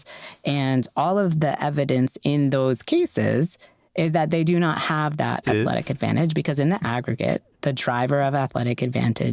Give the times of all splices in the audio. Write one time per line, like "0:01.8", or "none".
none